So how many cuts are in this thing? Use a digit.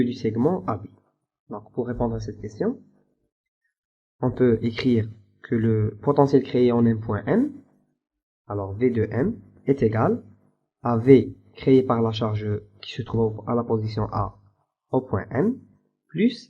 0